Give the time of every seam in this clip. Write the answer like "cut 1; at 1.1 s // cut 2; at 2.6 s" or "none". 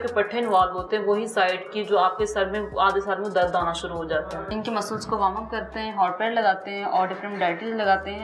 cut 1; at 4.4 s

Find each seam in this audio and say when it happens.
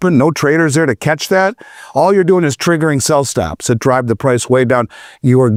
none

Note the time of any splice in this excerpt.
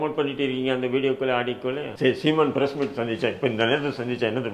cut 1; at 1.9 s

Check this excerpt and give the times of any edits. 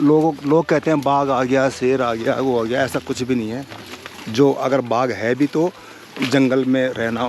none

